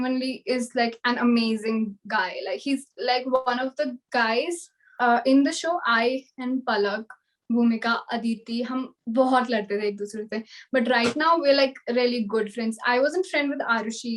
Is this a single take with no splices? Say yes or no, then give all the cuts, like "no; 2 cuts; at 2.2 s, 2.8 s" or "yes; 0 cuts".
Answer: no; 1 cut; at 4.8 s